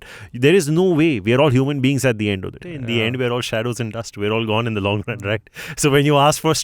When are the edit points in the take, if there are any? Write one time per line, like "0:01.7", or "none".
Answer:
0:02.6